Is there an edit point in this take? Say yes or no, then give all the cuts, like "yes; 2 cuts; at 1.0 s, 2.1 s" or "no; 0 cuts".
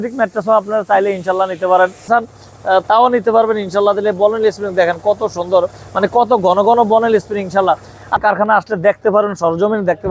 yes; 2 cuts; at 2.0 s, 8.2 s